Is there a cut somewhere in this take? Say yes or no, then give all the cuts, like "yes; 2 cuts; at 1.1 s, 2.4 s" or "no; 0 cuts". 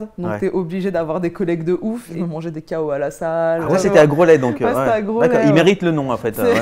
yes; 2 cuts; at 2.1 s, 3.8 s